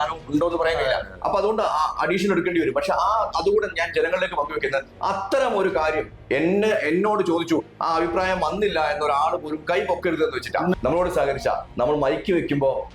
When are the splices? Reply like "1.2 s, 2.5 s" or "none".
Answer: 10.7 s